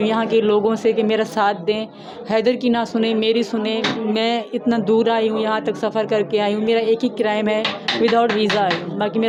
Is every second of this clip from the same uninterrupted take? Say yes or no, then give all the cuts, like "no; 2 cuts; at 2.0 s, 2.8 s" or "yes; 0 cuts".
yes; 0 cuts